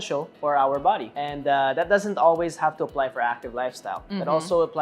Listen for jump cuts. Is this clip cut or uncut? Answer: cut